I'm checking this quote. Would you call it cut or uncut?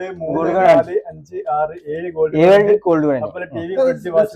uncut